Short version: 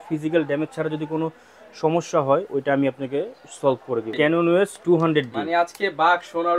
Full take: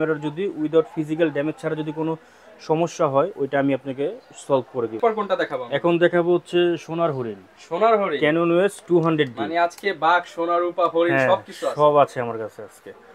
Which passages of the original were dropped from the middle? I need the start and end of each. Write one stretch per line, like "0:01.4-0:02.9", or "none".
0:05.0-0:08.2